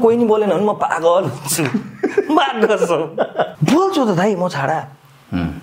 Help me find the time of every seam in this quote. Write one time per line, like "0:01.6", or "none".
0:03.5